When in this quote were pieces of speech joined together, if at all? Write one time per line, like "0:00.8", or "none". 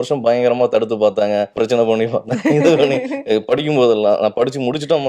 0:01.5